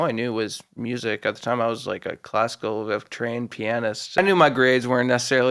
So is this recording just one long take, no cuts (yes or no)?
no